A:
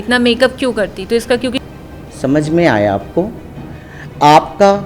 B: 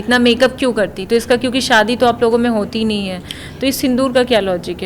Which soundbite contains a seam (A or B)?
A